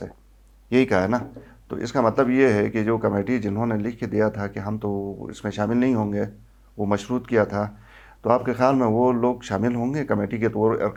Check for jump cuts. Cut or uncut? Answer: uncut